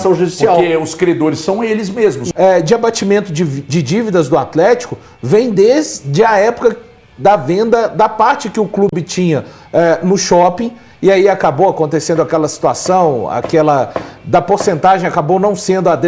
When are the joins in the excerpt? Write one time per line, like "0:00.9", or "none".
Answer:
0:02.2